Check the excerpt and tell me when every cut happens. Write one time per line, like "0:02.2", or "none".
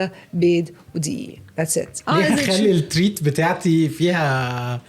0:02.0